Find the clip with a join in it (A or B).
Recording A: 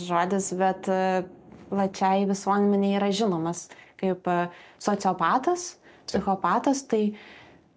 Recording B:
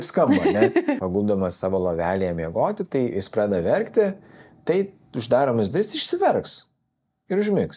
B